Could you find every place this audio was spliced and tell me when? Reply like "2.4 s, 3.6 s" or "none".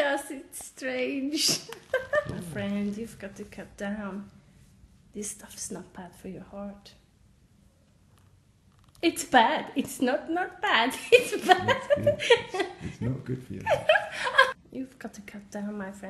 8.7 s

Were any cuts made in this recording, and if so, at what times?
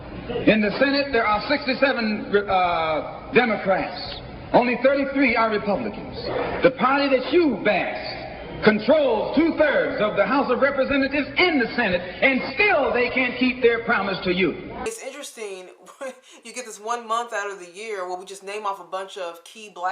14.8 s

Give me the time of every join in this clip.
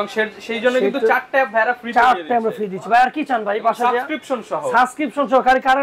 none

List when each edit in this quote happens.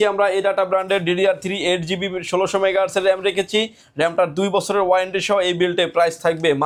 none

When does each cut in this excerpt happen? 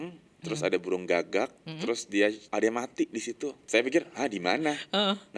2.4 s, 3.6 s

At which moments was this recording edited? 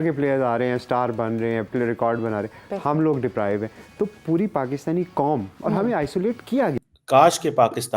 6.9 s

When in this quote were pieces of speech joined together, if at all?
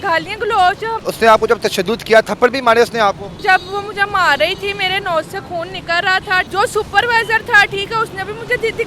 1.0 s, 3.4 s, 6.5 s

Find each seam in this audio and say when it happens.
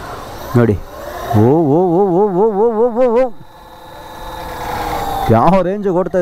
none

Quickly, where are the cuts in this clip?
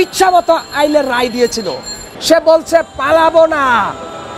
2.1 s

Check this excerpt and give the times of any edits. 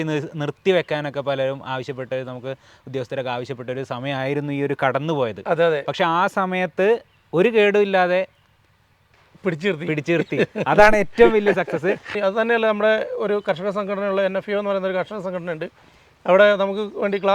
12.2 s

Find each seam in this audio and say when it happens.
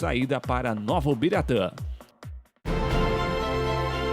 2.6 s

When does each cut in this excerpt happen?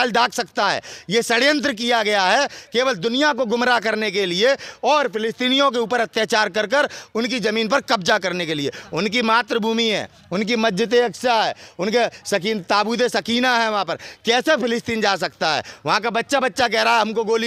none

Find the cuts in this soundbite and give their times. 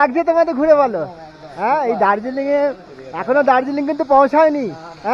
none

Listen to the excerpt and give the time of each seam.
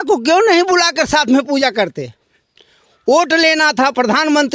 none

